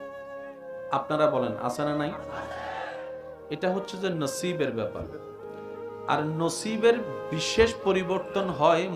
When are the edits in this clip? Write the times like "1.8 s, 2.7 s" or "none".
0.9 s

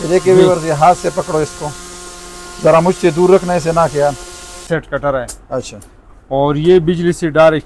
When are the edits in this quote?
4.7 s

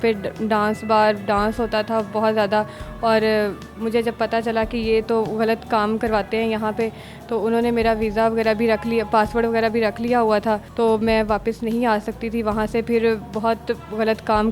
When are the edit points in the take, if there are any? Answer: none

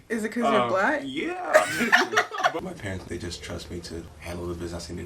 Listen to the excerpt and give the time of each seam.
2.6 s, 4.1 s

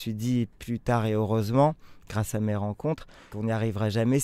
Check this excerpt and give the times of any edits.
3.3 s

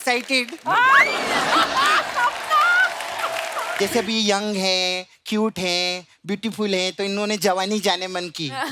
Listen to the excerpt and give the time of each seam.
3.7 s

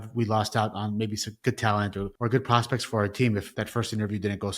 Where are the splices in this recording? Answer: 2.1 s, 3.5 s

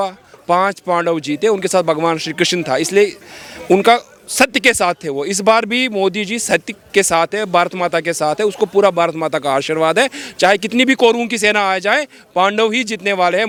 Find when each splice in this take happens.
none

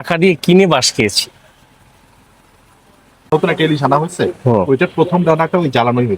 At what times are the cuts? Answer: 3.1 s

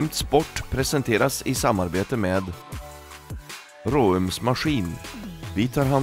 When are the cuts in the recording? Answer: none

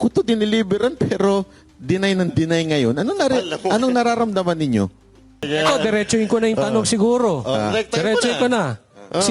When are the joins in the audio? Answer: 5.4 s

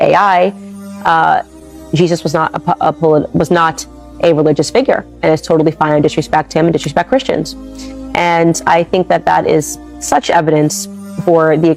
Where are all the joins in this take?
none

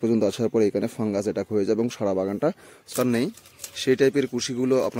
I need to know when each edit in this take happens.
2.9 s

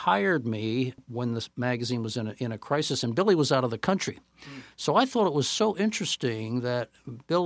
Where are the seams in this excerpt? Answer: 1.0 s

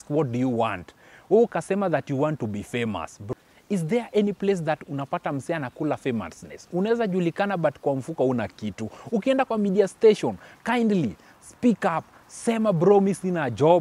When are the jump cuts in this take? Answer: 3.2 s

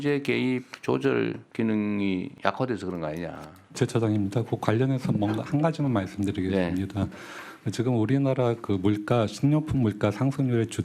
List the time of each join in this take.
1.4 s, 2.3 s, 3.8 s

